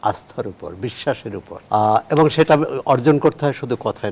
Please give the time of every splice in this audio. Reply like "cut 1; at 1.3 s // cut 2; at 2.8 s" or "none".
cut 1; at 1.5 s